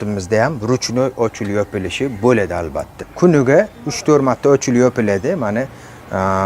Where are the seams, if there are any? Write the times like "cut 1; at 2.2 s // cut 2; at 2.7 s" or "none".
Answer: cut 1; at 3.0 s